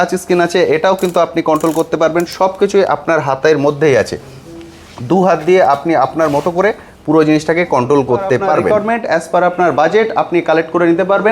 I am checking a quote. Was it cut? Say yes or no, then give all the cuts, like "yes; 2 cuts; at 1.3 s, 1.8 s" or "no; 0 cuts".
yes; 1 cut; at 8.7 s